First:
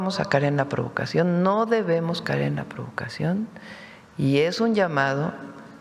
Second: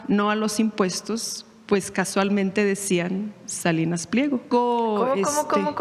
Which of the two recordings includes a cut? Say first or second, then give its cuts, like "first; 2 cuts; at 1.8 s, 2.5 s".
second; 1 cut; at 4.5 s